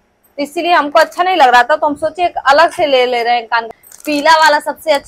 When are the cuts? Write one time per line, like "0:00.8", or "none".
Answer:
0:03.7